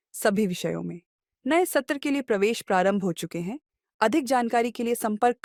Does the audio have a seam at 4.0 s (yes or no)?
no